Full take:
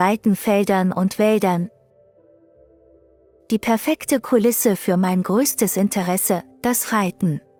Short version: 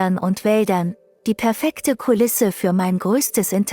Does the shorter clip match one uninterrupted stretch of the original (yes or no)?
no